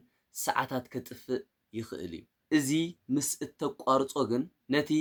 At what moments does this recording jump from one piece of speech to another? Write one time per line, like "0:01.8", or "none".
none